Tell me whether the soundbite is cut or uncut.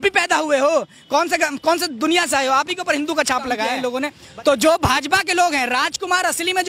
cut